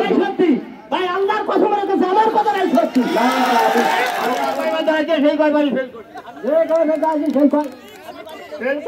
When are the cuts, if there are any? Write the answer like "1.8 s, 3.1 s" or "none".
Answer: 4.5 s